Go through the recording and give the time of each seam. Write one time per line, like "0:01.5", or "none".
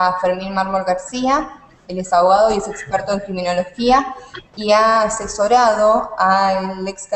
0:02.1